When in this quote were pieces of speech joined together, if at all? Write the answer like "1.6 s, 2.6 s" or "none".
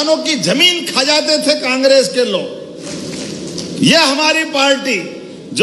none